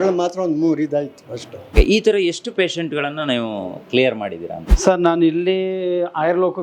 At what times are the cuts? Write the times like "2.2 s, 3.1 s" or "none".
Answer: 1.7 s